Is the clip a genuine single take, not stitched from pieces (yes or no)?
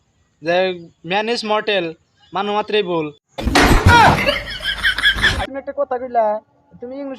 no